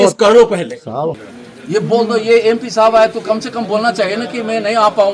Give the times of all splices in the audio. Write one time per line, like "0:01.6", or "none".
0:01.3